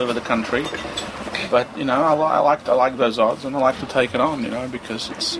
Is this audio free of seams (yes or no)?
yes